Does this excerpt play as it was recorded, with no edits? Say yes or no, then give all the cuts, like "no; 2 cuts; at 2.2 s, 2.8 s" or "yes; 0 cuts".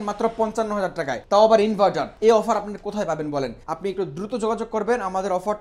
no; 3 cuts; at 1.2 s, 2.1 s, 3.6 s